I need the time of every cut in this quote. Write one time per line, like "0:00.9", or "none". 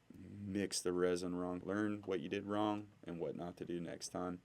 0:01.6